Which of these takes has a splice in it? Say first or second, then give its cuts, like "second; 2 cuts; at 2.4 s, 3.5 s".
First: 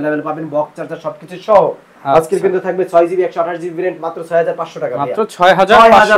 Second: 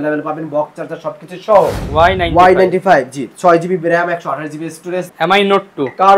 second; 2 cuts; at 1.8 s, 5.1 s